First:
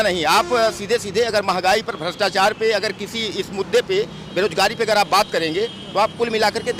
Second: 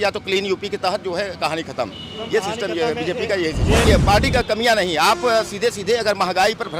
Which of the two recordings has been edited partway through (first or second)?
second